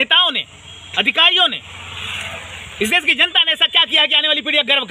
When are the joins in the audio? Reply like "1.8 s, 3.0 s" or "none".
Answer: none